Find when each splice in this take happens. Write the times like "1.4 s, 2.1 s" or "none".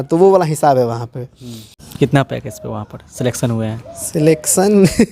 1.9 s

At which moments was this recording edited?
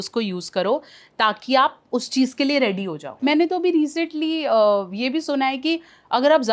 3.0 s

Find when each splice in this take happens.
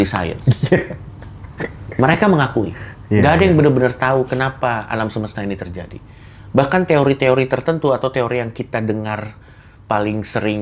none

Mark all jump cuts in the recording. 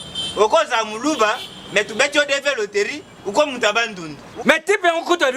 4.3 s

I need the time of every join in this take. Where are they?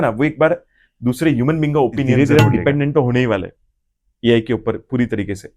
2.1 s

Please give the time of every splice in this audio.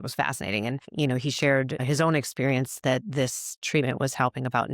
0.9 s, 1.8 s

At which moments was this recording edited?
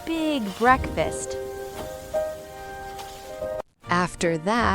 3.6 s

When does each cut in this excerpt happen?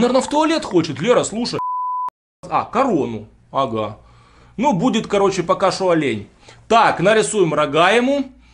1.9 s

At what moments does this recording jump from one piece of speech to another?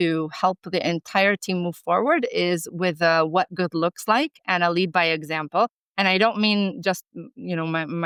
none

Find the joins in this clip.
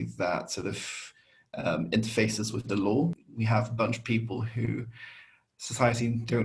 3.3 s

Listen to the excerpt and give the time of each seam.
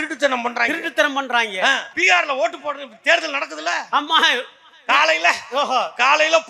1.9 s

